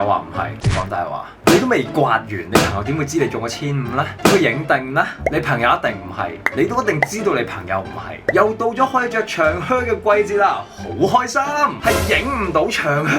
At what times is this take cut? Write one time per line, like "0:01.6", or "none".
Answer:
0:08.2
0:11.8